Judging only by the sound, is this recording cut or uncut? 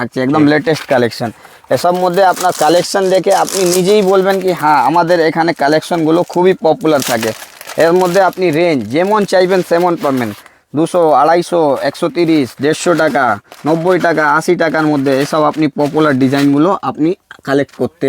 uncut